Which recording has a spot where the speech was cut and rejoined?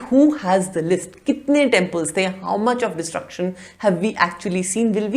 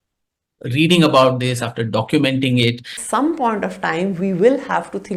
second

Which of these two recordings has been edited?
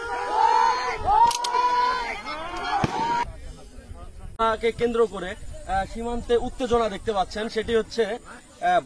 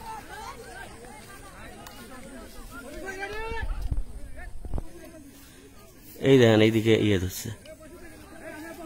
first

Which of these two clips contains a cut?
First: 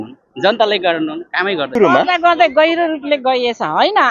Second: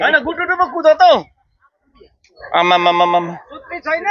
first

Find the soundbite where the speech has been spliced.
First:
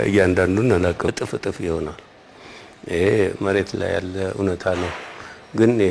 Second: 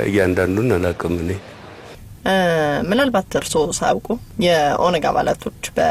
first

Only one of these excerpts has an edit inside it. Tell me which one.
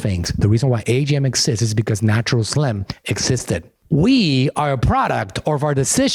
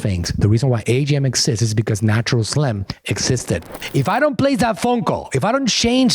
second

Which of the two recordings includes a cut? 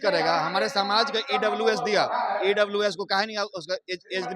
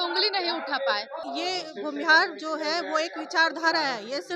second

